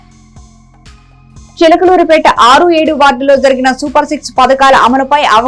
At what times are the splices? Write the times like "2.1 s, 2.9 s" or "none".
1.0 s